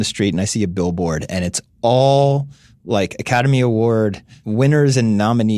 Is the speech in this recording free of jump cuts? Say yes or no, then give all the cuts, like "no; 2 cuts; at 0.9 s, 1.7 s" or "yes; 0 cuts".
yes; 0 cuts